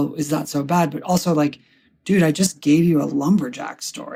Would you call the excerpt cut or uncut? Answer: uncut